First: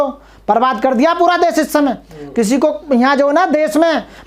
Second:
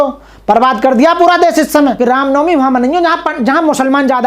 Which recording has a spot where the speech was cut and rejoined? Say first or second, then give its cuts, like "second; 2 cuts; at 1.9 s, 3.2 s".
second; 1 cut; at 2.0 s